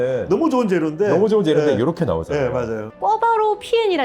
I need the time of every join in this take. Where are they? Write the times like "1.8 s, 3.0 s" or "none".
2.9 s